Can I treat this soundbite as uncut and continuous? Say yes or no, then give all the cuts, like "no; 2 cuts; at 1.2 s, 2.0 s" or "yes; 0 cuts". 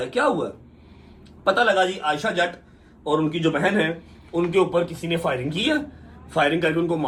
yes; 0 cuts